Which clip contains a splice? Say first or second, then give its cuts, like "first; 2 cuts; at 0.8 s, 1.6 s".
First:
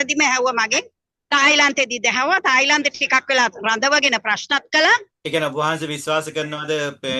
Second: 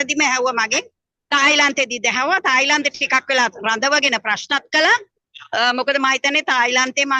first; 1 cut; at 5.1 s